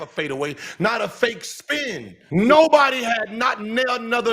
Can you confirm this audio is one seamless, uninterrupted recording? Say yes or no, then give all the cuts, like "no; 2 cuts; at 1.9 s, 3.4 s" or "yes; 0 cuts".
no; 1 cut; at 2.1 s